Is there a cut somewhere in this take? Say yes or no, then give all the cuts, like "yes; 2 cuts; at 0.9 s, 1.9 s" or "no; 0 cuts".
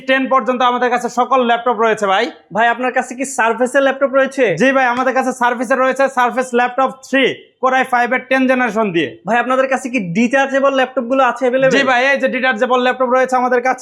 no; 0 cuts